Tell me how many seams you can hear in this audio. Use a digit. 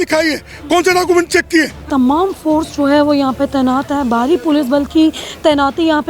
1